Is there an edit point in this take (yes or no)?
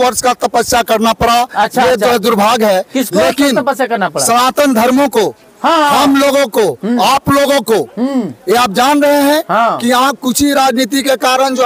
no